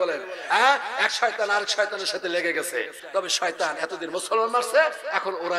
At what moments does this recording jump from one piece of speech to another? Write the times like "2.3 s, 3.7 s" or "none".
3.0 s